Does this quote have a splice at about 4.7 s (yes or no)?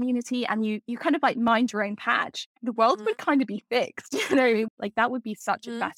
yes